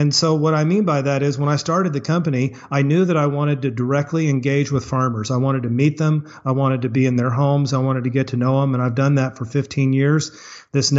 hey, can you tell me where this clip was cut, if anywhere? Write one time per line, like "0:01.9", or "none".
none